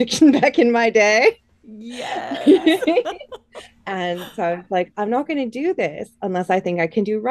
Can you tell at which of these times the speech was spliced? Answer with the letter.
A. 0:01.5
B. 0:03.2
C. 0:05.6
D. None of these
D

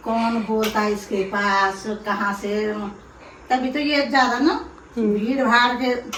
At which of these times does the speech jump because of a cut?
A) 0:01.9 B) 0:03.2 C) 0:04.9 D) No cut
D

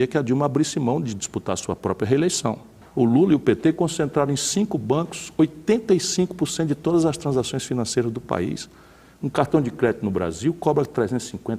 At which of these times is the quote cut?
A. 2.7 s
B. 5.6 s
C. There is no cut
A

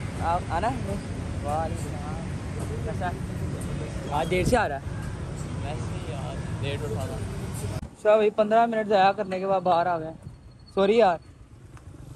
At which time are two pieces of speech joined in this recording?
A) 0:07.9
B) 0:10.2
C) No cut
A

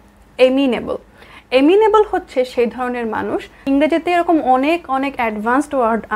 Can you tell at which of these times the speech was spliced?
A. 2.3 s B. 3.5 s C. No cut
B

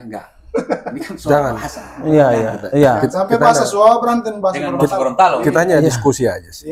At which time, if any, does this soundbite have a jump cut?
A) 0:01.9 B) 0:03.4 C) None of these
C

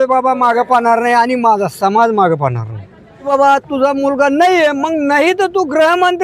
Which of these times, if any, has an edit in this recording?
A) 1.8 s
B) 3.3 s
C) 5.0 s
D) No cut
B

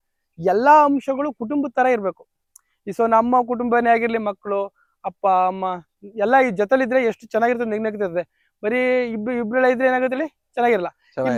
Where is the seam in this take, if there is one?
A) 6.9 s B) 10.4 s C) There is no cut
C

